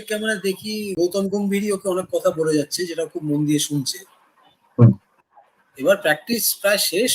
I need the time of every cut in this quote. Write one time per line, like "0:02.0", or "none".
0:00.9